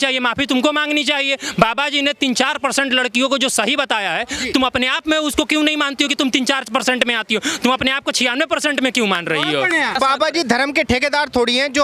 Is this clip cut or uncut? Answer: cut